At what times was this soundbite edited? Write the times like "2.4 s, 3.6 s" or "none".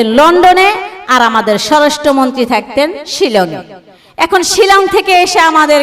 none